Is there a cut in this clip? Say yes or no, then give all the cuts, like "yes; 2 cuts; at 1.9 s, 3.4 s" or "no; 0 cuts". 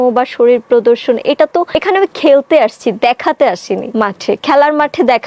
yes; 2 cuts; at 1.7 s, 3.9 s